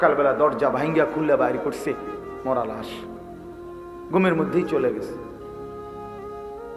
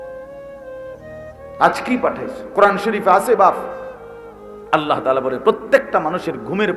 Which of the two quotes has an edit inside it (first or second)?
second